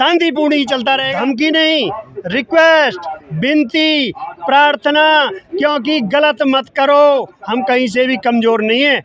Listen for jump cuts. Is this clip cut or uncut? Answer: cut